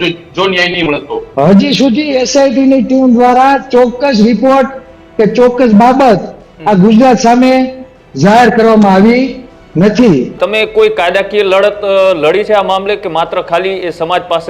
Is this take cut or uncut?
cut